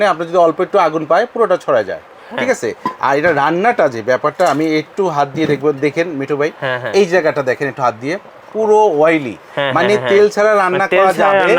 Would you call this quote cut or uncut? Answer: uncut